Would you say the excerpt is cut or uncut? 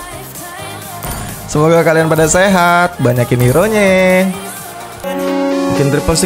cut